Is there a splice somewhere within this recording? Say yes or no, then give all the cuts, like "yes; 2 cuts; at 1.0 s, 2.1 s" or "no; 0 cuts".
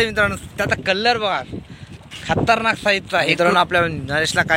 yes; 1 cut; at 3.3 s